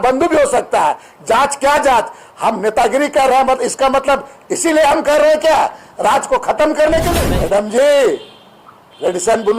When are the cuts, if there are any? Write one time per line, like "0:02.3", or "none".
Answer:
0:07.1